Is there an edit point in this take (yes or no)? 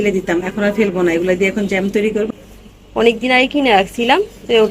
yes